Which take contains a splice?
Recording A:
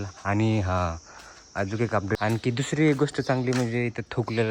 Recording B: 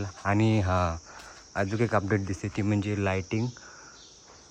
A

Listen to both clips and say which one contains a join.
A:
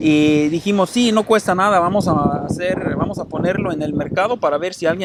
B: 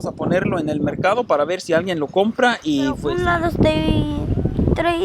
B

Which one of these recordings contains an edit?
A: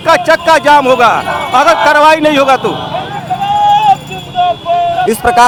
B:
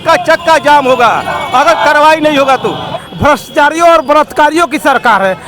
B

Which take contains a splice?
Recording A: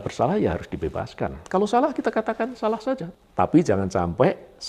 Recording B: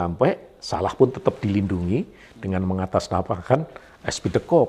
A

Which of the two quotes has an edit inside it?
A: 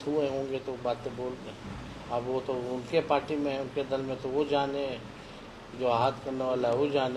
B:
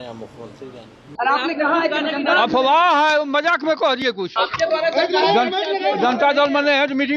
B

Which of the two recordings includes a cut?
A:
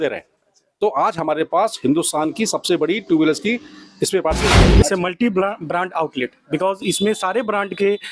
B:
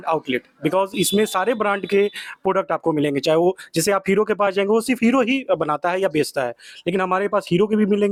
A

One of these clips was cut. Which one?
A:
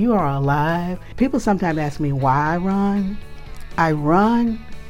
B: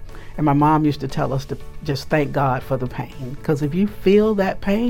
A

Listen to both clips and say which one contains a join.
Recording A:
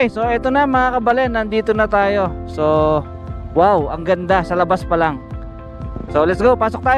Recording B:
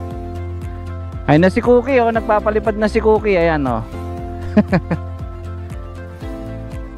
B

